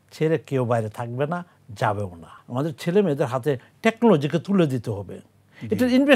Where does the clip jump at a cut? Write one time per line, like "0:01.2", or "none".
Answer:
0:02.4